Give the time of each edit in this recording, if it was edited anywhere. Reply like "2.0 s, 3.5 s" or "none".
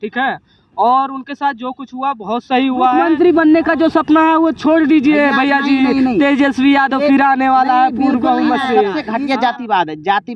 3.0 s, 9.0 s